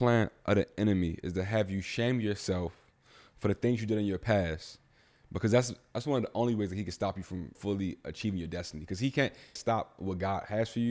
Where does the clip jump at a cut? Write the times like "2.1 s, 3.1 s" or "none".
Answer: 7.6 s, 9.5 s